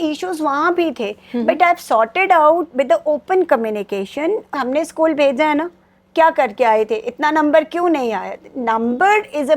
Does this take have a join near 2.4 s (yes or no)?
no